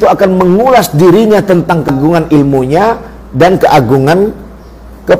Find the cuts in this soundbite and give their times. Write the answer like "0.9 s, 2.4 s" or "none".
1.9 s